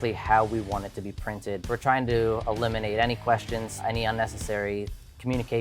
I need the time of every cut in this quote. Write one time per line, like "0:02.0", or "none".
0:01.6
0:03.7